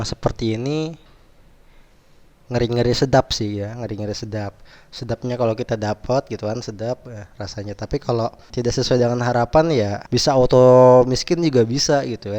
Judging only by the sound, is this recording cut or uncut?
cut